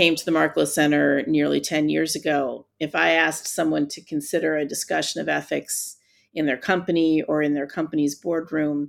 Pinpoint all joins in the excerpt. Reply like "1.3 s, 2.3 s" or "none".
none